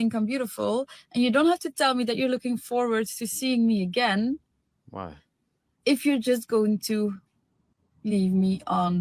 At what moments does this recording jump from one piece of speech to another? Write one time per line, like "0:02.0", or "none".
none